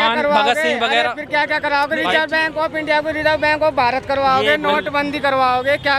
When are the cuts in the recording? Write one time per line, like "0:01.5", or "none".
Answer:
none